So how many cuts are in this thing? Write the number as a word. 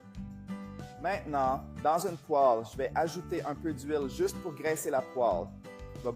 zero